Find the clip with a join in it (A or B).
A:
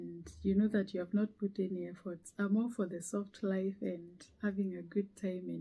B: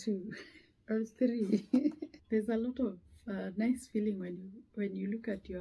B